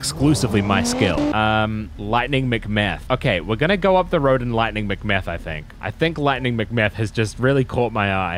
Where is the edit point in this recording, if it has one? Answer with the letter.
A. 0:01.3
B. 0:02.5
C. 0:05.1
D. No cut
A